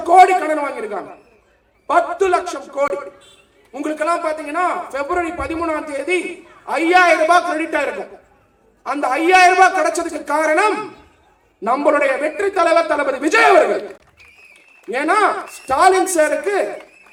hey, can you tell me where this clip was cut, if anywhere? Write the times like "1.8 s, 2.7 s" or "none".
none